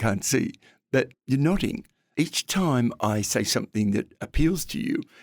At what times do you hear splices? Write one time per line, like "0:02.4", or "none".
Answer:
0:01.2
0:01.9